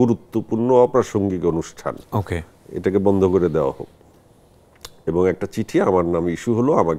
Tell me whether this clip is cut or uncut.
uncut